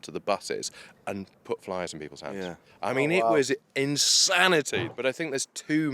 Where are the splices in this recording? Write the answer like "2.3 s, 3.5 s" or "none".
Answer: 4.9 s